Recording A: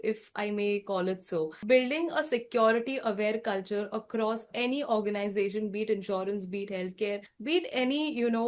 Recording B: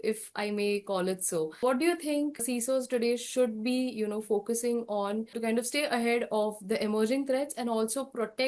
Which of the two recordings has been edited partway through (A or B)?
A